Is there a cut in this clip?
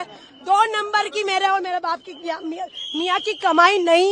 no; 0 cuts

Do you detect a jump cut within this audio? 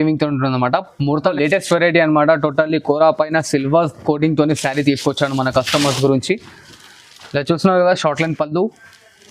yes; 1 cut; at 1.3 s

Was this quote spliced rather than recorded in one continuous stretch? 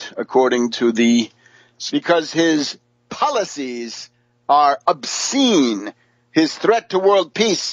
no; 0 cuts

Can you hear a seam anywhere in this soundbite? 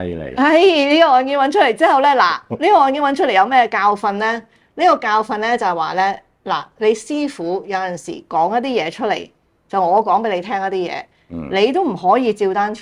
no; 0 cuts

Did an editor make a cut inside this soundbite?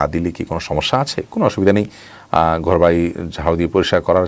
no; 0 cuts

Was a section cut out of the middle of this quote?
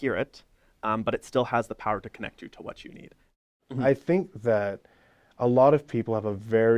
yes; 1 cut; at 3.4 s

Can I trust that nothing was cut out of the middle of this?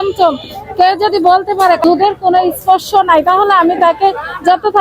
no; 1 cut; at 1.8 s

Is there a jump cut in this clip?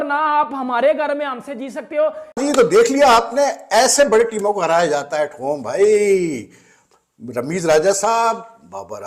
yes; 1 cut; at 2.3 s

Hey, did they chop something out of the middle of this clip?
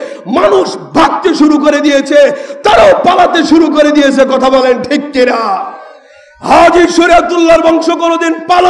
no; 0 cuts

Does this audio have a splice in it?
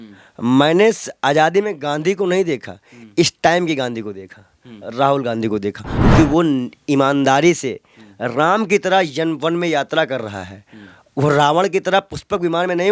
yes; 1 cut; at 5.9 s

